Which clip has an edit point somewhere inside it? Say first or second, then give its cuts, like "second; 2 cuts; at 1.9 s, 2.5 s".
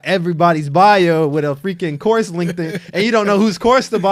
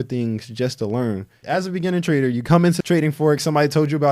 second; 2 cuts; at 1.4 s, 2.8 s